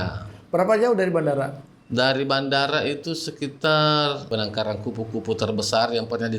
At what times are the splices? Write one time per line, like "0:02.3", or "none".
0:04.3